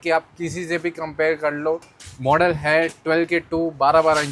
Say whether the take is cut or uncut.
cut